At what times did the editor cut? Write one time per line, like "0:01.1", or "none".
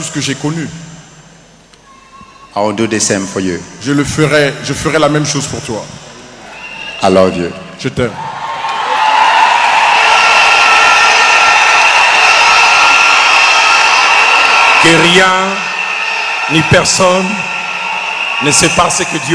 none